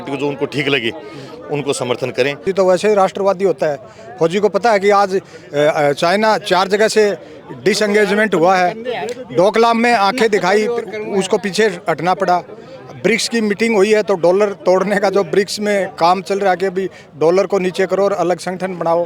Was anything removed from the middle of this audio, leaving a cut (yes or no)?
yes